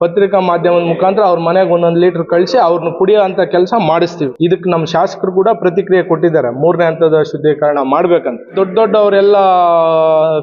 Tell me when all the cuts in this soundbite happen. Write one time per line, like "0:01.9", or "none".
0:04.2
0:08.5